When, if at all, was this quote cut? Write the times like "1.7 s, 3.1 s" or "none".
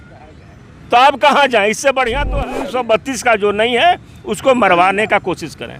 2.4 s